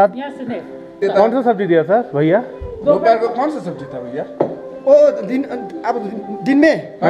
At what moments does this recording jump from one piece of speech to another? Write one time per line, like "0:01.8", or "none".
0:00.9